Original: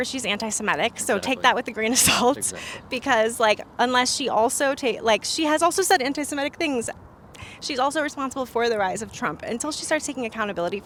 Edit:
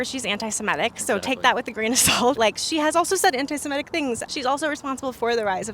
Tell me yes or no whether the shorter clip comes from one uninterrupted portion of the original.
no